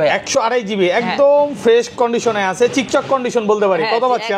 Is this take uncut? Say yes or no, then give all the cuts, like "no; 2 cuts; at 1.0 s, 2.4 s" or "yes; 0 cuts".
yes; 0 cuts